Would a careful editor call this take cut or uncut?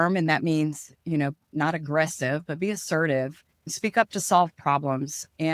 cut